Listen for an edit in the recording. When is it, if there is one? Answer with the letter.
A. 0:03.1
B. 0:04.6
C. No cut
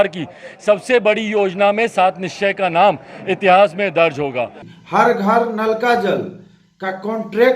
B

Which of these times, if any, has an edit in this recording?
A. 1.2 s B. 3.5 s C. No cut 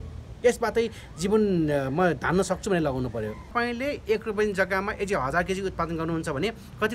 B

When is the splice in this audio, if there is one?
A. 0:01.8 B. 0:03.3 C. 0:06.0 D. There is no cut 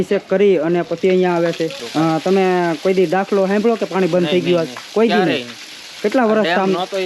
A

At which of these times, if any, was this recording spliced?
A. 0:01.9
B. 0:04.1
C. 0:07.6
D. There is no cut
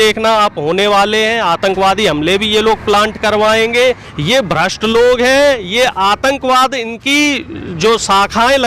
B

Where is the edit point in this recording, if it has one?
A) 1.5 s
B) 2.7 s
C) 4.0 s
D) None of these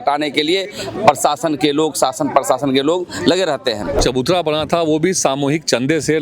C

